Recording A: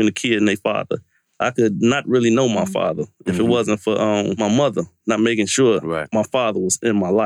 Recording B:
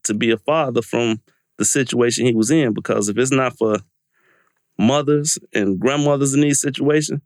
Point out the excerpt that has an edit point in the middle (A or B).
A